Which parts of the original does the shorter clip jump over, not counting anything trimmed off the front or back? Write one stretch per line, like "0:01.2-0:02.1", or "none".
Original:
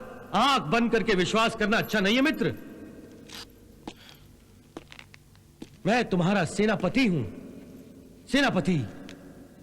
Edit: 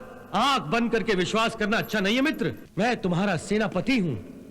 0:02.6-0:05.7